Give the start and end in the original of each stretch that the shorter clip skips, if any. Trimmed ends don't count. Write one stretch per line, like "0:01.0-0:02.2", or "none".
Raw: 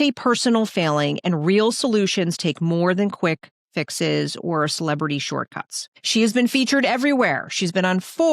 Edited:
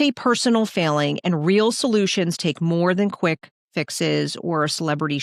none

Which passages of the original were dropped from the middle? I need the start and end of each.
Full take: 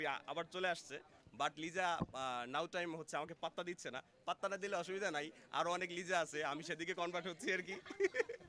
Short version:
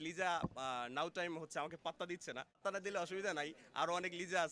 0:04.2-0:04.4

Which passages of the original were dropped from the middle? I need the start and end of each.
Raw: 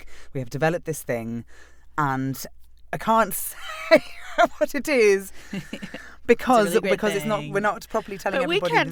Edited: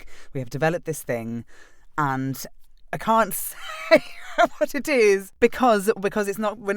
0:05.3-0:06.2

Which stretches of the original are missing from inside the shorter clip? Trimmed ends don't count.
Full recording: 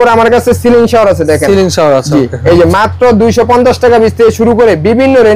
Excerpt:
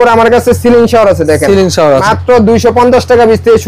0:02.0-0:02.8

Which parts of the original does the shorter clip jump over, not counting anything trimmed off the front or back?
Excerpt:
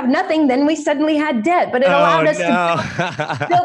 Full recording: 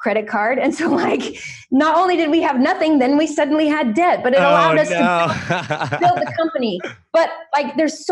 none

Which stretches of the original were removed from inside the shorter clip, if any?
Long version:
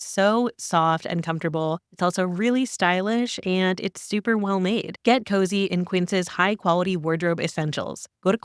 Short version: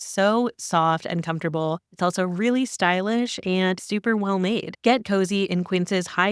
0:03.8-0:04.0

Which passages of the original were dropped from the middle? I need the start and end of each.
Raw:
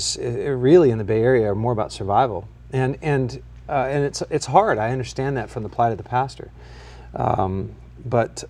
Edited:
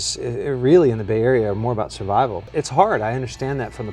0:02.5-0:04.2

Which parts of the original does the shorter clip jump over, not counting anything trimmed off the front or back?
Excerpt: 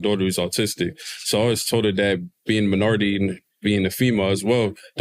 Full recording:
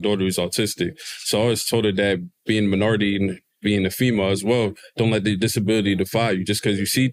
none

